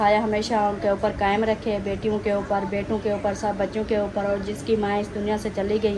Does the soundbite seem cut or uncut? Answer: uncut